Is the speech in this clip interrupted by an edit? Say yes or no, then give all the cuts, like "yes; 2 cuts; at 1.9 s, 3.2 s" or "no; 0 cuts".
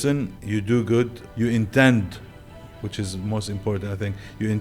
yes; 1 cut; at 1.2 s